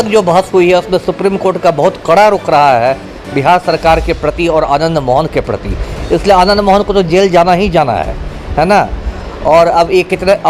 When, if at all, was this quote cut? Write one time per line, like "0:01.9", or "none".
none